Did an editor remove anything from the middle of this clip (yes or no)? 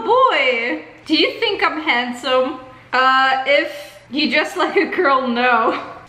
yes